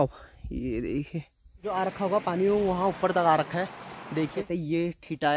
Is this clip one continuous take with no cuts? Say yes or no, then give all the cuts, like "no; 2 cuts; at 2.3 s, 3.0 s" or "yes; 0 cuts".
no; 2 cuts; at 1.6 s, 4.4 s